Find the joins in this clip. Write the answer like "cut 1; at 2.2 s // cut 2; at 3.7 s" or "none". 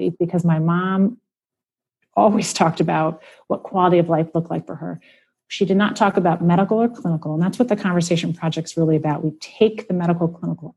none